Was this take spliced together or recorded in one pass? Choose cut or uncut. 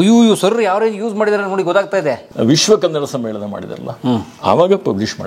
cut